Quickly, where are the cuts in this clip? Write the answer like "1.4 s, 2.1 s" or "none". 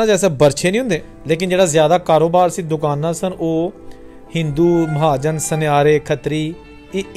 1.1 s